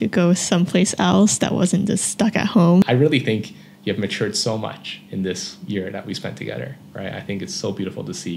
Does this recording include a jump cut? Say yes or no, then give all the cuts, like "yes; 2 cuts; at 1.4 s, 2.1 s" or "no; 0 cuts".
yes; 1 cut; at 2.8 s